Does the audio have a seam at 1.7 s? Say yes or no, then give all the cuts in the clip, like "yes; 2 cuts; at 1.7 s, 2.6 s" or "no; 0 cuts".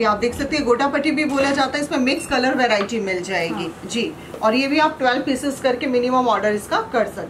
no; 0 cuts